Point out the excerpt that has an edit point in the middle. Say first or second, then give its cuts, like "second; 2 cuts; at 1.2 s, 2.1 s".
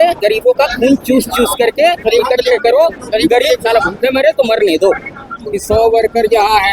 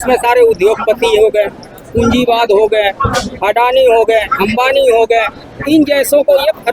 first; 1 cut; at 5.6 s